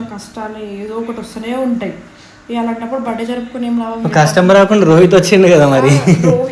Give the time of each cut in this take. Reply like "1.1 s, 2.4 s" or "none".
none